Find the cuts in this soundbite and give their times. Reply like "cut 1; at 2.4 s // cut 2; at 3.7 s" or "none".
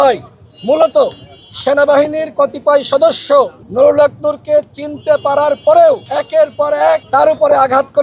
cut 1; at 3.6 s // cut 2; at 6.0 s // cut 3; at 7.0 s